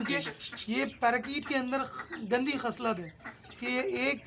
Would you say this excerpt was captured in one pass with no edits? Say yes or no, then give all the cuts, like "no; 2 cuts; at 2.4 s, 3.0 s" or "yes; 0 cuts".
yes; 0 cuts